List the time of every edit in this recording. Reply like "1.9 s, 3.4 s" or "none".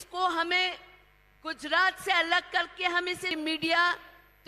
3.3 s